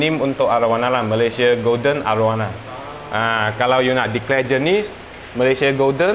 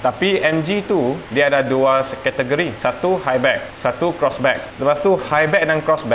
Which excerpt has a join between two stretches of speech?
second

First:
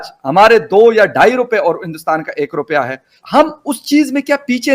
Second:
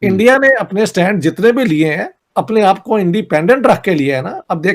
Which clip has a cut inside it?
first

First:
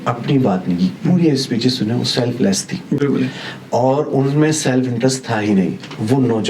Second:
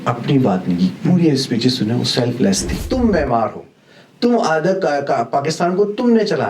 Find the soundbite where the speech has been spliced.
second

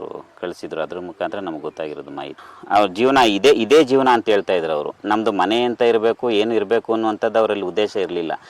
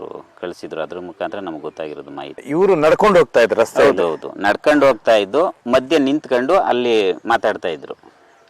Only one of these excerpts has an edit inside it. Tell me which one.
first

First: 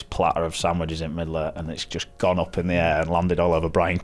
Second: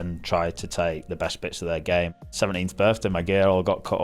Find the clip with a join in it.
second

